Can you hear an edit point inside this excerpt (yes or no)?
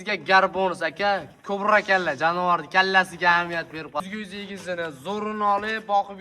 yes